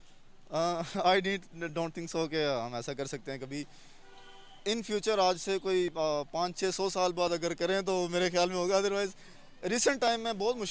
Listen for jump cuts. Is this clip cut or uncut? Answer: uncut